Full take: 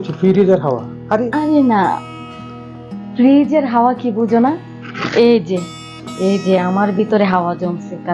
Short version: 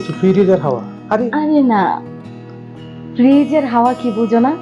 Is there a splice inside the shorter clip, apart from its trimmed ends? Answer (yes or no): no